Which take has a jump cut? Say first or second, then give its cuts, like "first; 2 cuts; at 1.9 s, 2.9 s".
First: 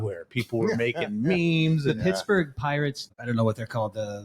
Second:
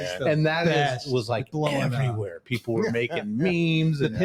first; 1 cut; at 3.0 s